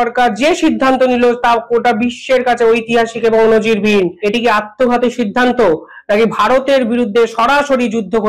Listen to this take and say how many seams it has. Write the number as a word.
one